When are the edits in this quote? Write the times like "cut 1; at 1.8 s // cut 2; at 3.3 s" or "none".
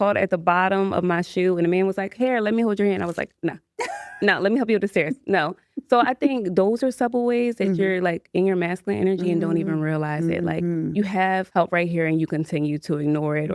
cut 1; at 11.5 s

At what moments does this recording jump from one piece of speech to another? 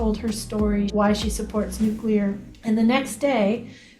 cut 1; at 0.9 s // cut 2; at 2.5 s

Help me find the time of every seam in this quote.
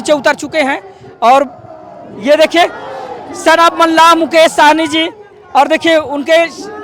none

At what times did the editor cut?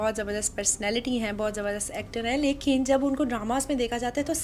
none

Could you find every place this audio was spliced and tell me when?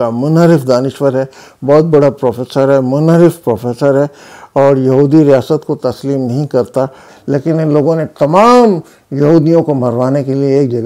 cut 1; at 7.1 s

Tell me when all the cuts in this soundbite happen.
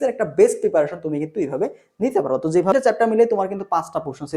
cut 1; at 2.7 s

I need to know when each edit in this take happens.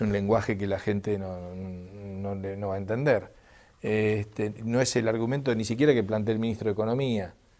cut 1; at 3.1 s

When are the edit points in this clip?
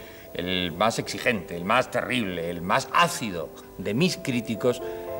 none

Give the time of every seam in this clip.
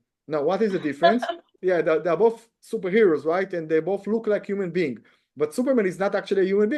cut 1; at 1.5 s

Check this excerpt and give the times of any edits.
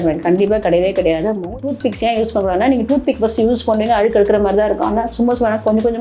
cut 1; at 1.4 s

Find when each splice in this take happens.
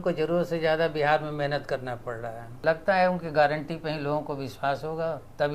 cut 1; at 2.5 s

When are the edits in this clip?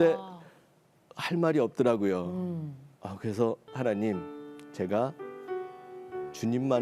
cut 1; at 3.7 s

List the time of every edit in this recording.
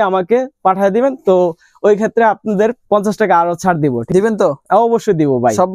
cut 1; at 4.0 s

